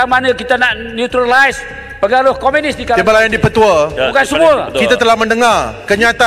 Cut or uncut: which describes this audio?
uncut